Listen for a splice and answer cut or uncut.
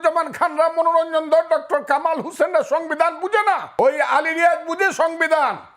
cut